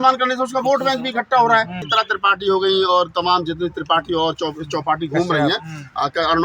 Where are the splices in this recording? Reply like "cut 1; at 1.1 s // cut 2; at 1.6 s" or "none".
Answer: cut 1; at 1.8 s